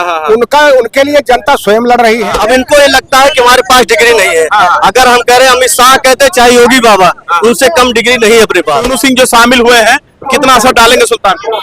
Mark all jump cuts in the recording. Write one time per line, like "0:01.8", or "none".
0:02.4
0:08.9